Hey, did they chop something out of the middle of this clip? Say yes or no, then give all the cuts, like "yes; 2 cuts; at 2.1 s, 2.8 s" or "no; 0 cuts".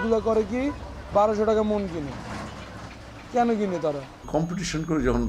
yes; 1 cut; at 4.2 s